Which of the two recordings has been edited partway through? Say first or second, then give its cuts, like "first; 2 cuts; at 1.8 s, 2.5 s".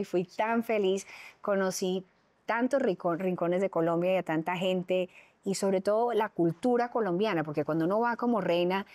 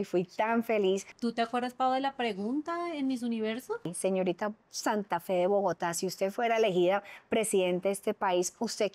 second; 2 cuts; at 1.1 s, 3.9 s